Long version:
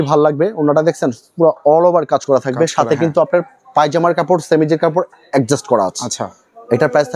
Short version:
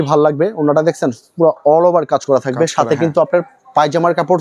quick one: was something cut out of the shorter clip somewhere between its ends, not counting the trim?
no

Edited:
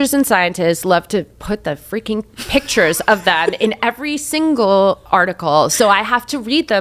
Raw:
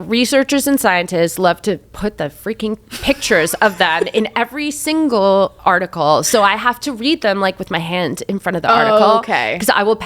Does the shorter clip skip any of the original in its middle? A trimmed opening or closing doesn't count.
no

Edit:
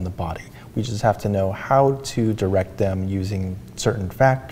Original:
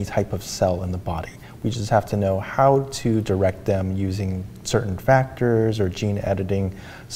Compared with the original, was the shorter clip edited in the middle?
no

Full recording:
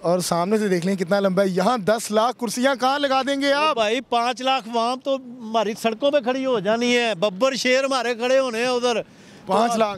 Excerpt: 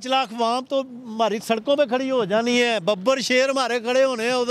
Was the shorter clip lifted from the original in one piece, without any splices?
yes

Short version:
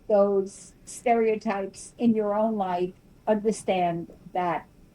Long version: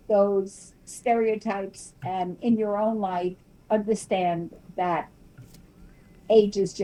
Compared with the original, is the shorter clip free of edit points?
no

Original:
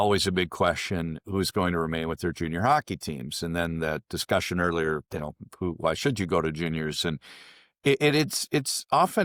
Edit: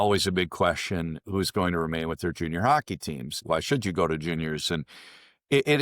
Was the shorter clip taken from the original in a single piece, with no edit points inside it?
no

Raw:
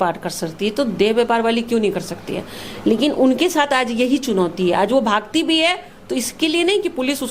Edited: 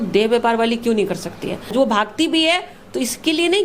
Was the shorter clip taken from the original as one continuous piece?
no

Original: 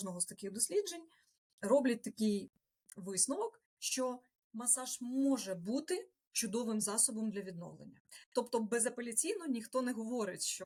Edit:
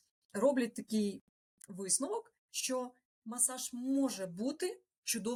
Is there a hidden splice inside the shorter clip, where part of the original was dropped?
no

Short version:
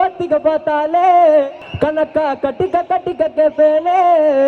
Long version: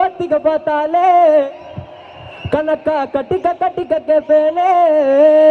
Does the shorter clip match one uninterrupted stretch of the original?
no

